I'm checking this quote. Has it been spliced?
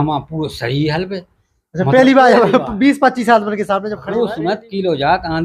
yes; 1 cut; at 3.9 s

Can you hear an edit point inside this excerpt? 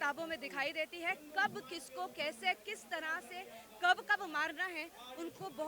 no; 0 cuts

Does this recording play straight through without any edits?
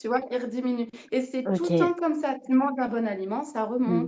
yes; 0 cuts

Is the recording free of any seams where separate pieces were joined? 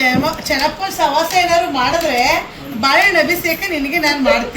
yes; 0 cuts

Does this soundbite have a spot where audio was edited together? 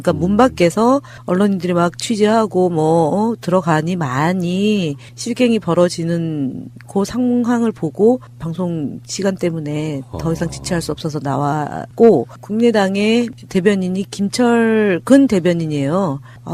no; 0 cuts

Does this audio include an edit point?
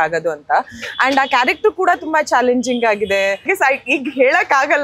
yes; 1 cut; at 3.5 s

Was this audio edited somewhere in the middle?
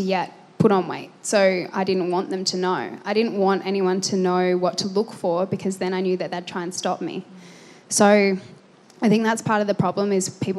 no; 0 cuts

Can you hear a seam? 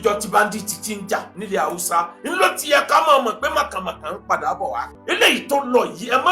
yes; 2 cuts; at 1.3 s, 4.9 s

